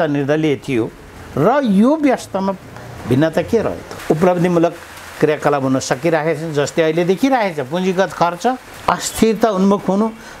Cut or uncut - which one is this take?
cut